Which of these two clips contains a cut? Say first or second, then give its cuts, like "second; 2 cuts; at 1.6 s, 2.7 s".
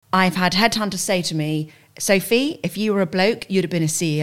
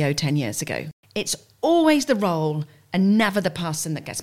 second; 1 cut; at 0.9 s